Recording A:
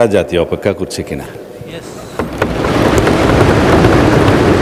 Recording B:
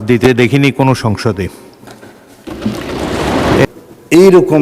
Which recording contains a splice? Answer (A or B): B